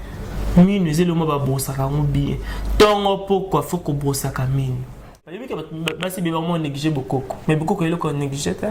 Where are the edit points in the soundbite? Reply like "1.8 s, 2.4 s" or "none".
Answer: 5.3 s